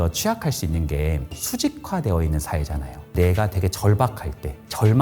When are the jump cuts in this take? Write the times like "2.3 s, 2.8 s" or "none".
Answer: 1.3 s, 3.1 s